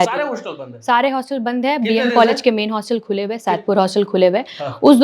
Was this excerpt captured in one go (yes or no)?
yes